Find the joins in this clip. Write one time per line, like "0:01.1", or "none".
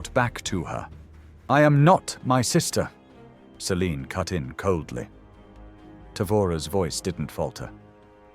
0:01.4